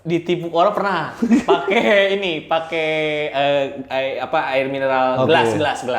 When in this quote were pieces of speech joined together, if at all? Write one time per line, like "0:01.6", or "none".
none